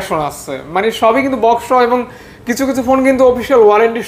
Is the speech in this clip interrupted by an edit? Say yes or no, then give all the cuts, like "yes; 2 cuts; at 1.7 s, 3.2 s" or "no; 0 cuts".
no; 0 cuts